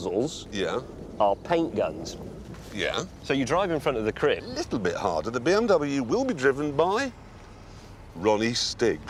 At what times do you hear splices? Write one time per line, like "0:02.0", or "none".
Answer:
none